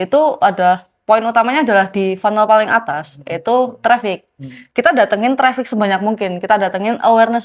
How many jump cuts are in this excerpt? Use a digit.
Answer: 0